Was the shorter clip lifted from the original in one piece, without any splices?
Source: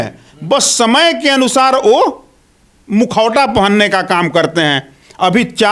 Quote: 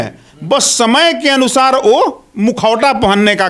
no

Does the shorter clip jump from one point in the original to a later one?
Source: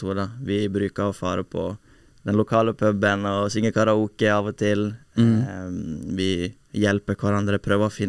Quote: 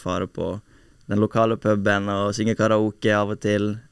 no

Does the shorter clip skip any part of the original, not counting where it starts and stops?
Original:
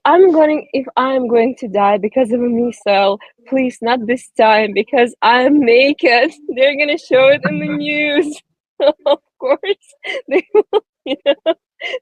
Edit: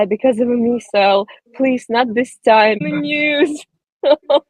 yes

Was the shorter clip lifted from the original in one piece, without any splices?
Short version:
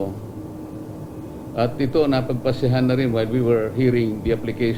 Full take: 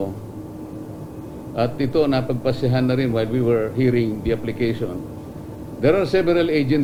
yes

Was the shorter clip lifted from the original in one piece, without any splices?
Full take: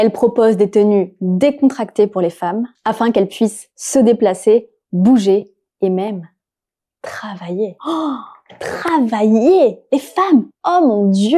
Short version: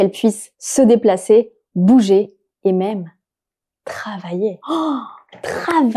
yes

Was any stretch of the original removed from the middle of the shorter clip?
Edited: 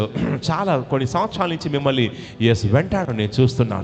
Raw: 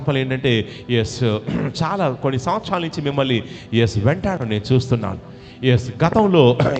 no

